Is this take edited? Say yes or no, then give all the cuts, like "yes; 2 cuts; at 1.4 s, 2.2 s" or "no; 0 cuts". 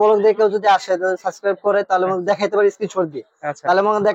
no; 0 cuts